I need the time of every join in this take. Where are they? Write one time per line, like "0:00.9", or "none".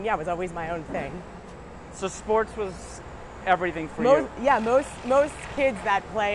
none